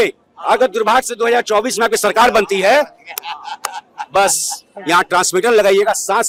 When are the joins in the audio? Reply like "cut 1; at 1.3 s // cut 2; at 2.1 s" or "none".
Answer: none